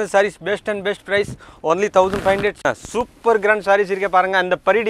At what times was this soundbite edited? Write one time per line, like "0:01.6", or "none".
0:02.6